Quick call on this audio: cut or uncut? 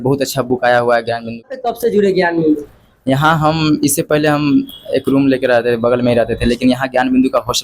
cut